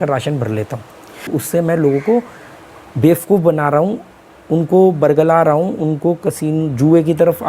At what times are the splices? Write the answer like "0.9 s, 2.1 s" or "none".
1.3 s